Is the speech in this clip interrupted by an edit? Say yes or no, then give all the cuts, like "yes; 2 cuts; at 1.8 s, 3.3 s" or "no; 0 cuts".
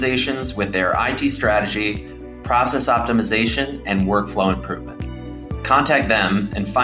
no; 0 cuts